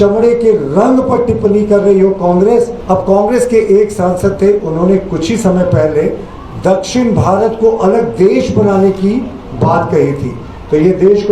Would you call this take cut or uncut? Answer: cut